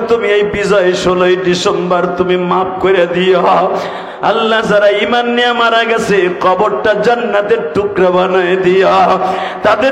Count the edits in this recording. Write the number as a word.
zero